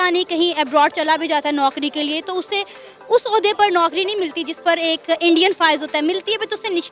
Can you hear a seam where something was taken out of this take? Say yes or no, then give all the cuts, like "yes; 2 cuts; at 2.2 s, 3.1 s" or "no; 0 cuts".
no; 0 cuts